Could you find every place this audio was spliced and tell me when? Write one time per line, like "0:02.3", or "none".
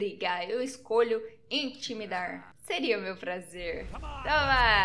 0:02.5